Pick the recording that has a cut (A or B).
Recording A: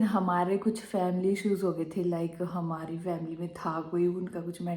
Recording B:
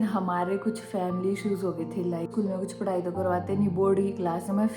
B